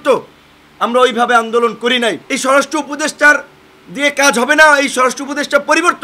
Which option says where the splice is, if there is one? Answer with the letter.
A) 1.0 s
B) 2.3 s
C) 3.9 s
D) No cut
B